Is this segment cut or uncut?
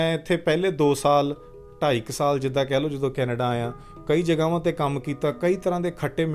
uncut